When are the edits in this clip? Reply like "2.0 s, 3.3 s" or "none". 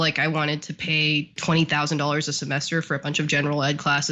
1.4 s